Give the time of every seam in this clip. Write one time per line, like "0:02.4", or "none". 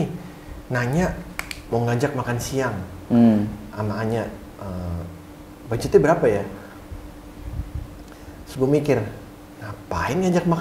none